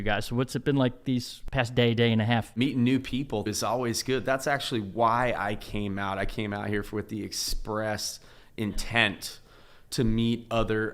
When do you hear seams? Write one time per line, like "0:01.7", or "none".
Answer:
0:01.4
0:02.5
0:03.5